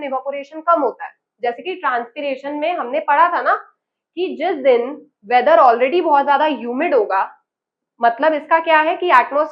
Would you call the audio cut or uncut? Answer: uncut